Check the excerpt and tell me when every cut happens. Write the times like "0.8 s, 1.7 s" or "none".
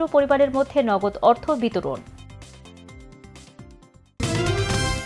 4.2 s